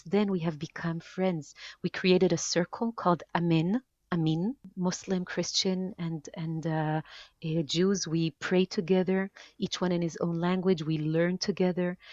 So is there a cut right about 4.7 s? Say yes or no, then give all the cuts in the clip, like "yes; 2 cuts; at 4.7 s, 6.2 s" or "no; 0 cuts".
yes; 1 cut; at 4.7 s